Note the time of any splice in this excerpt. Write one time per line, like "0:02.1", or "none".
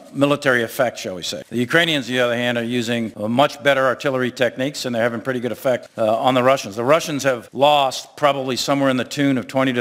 0:05.9